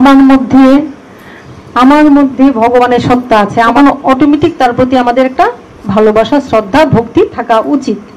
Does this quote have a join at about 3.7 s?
yes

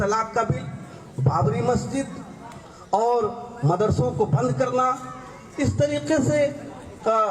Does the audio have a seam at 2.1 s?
no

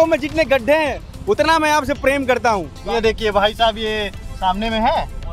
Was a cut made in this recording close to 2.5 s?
yes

